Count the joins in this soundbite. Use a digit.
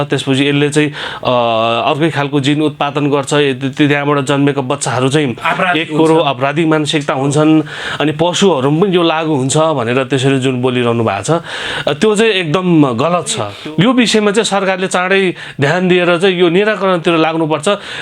1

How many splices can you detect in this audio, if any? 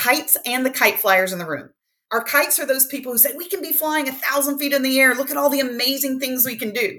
1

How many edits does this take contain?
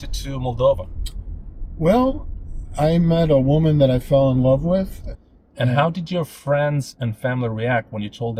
1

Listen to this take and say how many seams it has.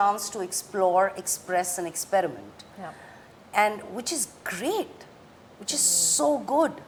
0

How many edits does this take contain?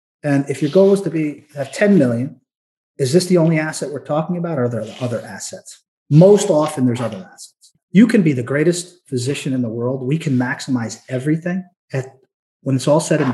2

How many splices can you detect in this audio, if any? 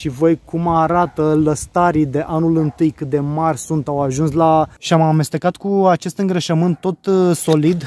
1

